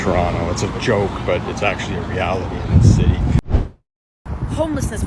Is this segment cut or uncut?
cut